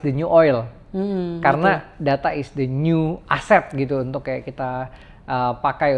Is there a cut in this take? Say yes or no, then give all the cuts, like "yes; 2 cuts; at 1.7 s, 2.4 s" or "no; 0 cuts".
no; 0 cuts